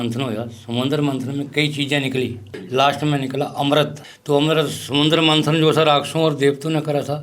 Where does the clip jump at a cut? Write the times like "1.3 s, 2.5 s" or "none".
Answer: 2.5 s, 4.1 s